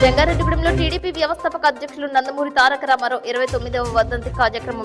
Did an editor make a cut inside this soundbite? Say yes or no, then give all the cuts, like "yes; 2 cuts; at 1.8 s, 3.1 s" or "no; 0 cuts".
no; 0 cuts